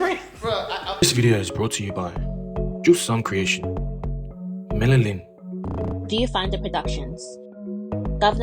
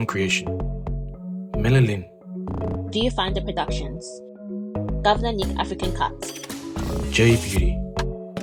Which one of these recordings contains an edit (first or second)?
first